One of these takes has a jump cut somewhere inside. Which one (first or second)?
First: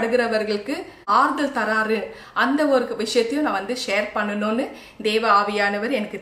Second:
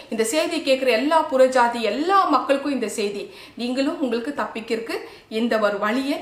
first